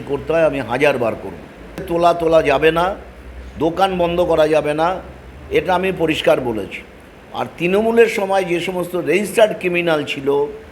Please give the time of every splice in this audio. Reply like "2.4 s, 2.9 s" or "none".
1.9 s